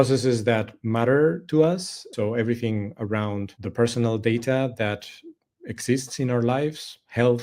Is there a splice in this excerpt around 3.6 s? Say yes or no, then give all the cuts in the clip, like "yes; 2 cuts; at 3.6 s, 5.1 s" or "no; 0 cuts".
yes; 2 cuts; at 2.0 s, 3.6 s